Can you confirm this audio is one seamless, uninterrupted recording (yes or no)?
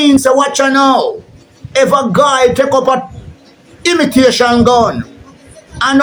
yes